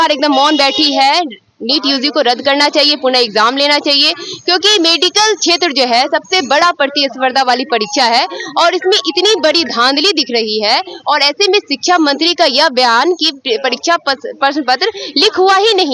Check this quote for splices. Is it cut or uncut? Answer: uncut